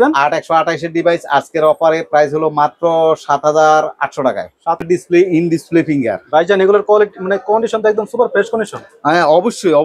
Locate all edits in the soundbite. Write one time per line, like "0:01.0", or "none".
0:04.8